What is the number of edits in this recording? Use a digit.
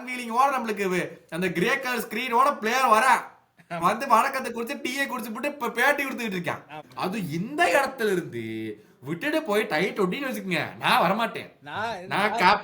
1